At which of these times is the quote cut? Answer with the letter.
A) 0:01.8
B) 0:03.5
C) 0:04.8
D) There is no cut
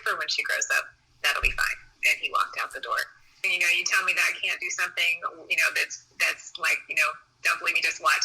B